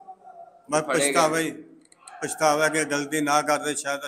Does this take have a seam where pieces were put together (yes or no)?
no